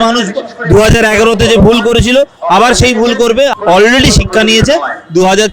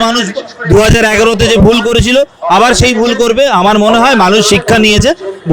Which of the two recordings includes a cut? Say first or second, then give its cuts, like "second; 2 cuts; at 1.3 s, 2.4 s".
first; 1 cut; at 3.5 s